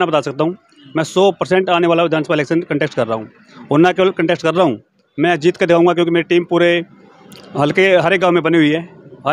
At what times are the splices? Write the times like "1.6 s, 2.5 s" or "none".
none